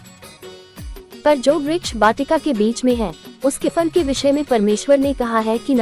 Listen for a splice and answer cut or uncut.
cut